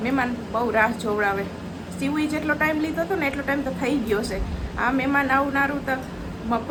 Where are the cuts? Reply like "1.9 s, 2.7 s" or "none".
none